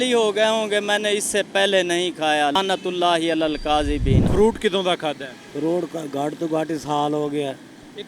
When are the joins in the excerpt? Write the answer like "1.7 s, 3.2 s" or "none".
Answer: 2.6 s, 4.2 s